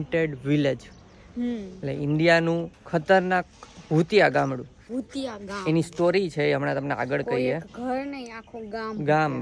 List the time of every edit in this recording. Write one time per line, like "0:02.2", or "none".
none

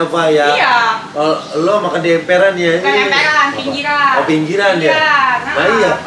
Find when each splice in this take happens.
none

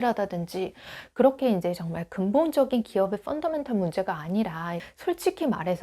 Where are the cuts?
0:04.9

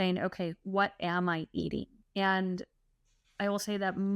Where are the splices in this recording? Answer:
0:02.0

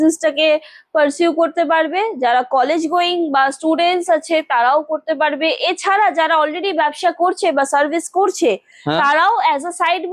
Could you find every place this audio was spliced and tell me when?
none

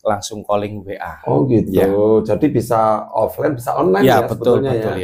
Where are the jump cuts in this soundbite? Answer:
none

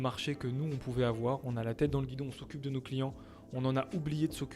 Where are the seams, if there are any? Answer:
none

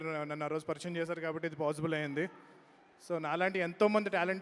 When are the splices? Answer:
none

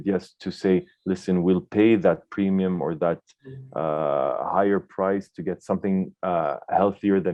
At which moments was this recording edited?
none

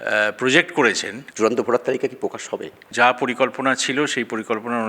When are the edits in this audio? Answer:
0:01.2
0:02.8

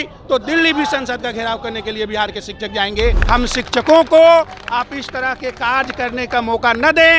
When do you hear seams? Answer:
0:03.1

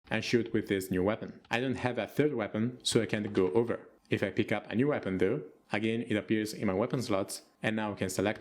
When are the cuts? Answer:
0:01.3

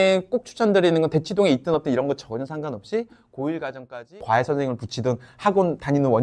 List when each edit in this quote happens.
0:04.2

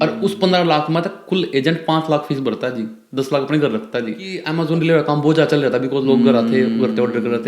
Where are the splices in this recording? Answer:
0:04.4

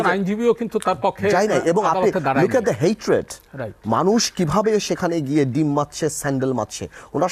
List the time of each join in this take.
none

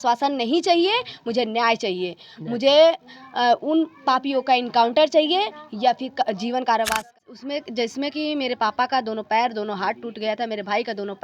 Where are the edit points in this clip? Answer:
0:07.1

